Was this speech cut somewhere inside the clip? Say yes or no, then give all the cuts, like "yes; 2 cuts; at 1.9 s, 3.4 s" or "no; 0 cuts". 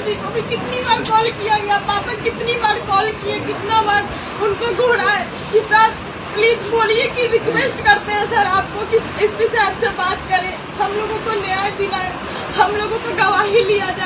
no; 0 cuts